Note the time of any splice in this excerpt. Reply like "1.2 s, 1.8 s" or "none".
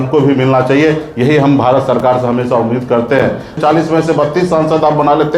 3.6 s